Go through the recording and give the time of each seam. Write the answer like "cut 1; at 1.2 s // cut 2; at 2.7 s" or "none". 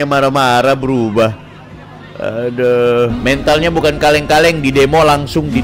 cut 1; at 3.4 s